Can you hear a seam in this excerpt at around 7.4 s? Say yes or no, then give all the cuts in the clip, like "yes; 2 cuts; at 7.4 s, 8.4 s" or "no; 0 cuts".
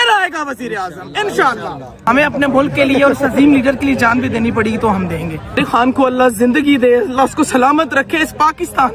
no; 2 cuts; at 1.9 s, 5.6 s